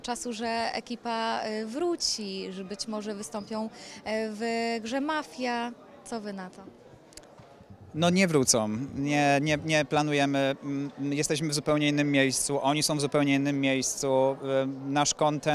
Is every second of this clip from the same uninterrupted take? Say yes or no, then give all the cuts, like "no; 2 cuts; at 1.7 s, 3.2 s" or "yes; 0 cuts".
yes; 0 cuts